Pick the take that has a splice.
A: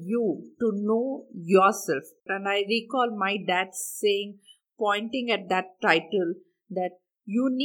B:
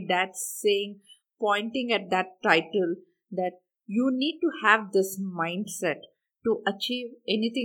A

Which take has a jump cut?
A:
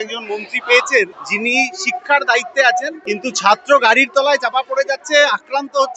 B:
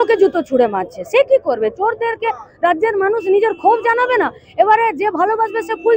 A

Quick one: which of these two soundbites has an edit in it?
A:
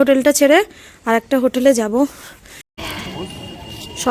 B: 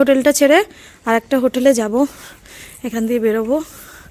A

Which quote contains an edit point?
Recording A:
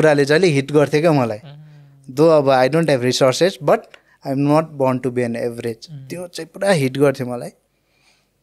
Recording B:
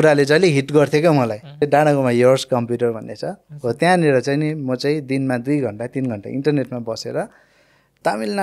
B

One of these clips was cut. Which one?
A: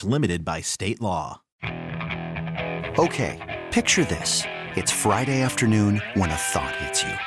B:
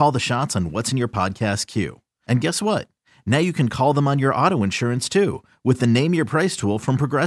A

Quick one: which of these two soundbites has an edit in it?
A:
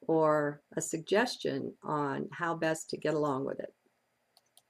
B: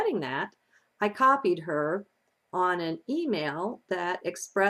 A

